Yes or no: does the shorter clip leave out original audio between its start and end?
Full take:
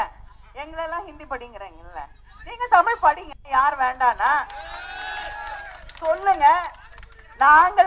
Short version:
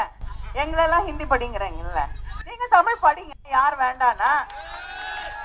no